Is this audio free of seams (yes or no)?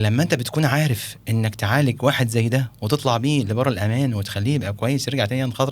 yes